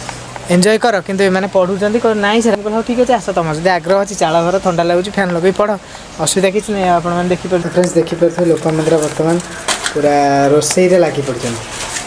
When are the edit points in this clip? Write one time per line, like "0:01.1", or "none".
0:02.6
0:07.6